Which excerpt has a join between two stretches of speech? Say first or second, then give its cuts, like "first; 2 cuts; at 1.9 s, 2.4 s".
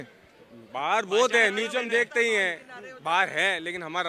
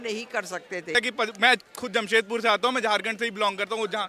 second; 1 cut; at 1.0 s